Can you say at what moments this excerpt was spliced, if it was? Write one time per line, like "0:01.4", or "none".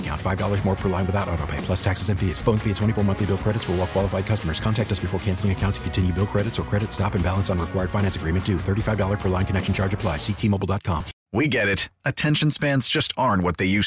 0:11.1

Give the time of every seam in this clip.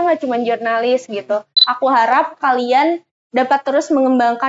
0:01.6

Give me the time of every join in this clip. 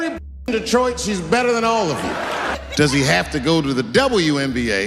0:02.4

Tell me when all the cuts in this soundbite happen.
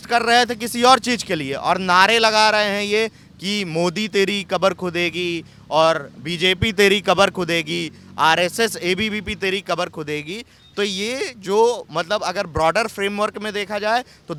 none

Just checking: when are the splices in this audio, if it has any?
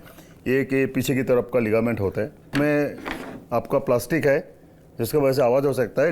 0:02.5

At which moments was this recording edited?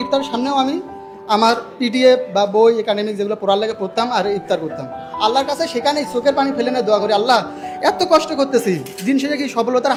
none

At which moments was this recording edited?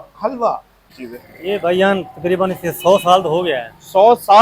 0:01.0

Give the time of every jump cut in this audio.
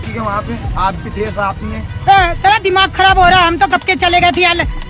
none

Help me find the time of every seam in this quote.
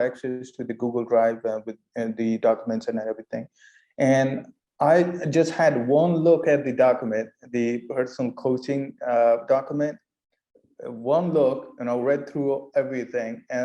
0:04.6

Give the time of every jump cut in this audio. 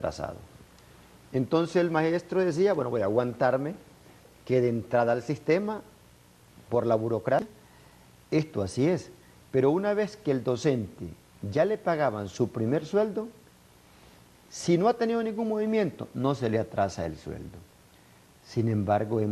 none

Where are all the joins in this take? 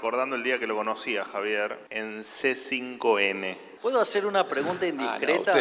0:01.9
0:03.6

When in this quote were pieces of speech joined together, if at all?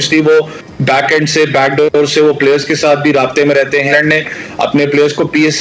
0:03.9

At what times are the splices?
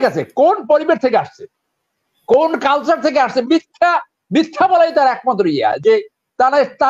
none

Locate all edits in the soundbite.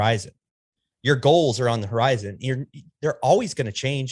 none

